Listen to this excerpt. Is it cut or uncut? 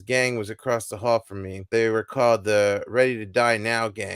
cut